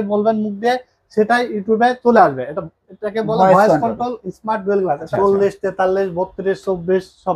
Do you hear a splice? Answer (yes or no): yes